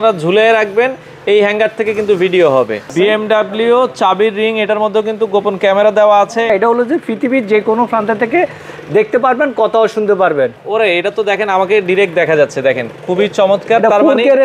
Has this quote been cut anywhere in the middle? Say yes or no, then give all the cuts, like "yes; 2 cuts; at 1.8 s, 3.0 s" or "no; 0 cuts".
yes; 3 cuts; at 2.9 s, 6.5 s, 10.6 s